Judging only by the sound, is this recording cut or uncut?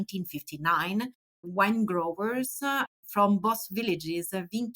cut